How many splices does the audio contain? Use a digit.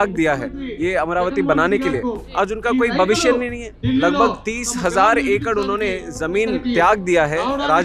1